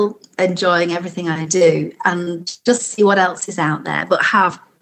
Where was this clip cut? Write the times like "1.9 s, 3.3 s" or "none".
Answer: none